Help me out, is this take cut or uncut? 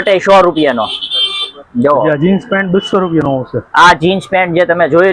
uncut